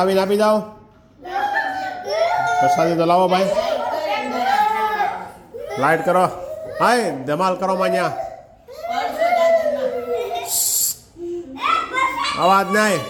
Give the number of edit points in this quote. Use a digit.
0